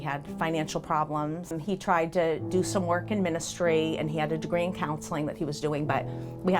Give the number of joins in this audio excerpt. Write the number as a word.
one